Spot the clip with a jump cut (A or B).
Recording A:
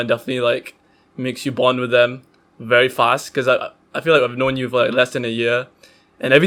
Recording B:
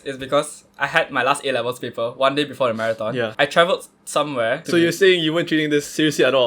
B